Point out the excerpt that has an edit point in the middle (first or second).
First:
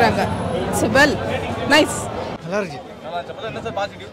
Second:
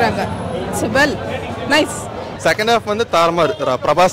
second